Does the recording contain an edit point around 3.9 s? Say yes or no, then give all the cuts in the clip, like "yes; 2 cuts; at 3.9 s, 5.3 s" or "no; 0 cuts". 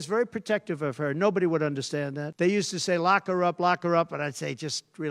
no; 1 cut; at 2.2 s